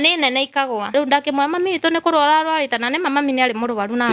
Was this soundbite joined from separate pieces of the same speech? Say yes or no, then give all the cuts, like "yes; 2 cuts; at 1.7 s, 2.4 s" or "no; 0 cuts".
yes; 1 cut; at 0.9 s